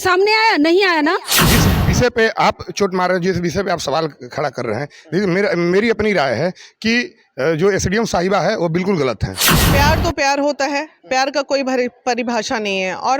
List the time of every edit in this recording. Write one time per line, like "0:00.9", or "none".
0:01.4
0:09.7